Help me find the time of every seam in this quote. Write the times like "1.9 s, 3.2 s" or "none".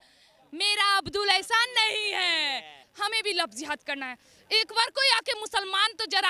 2.8 s